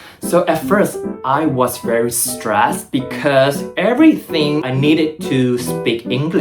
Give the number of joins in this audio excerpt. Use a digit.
1